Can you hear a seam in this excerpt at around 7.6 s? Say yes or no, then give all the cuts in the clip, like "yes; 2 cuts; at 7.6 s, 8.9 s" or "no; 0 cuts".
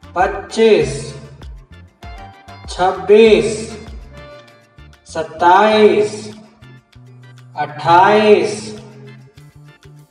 no; 2 cuts; at 1.6 s, 2.7 s